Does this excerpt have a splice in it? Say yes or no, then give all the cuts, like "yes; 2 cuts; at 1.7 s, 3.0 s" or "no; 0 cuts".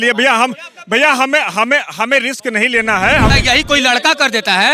yes; 1 cut; at 3.3 s